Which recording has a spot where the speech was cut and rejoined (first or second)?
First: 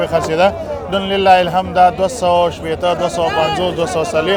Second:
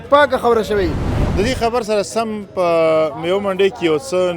second